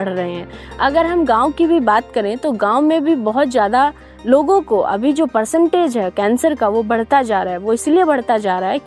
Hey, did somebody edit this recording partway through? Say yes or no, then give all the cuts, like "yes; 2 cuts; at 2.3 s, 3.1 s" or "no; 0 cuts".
no; 0 cuts